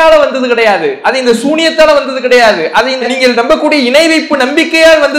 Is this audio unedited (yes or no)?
yes